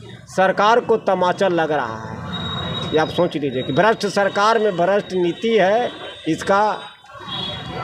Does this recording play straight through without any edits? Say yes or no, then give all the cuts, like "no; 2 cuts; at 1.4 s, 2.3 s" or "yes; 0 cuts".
yes; 0 cuts